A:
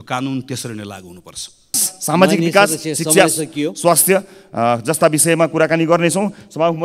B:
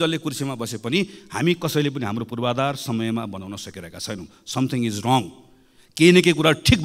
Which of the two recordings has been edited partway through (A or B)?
A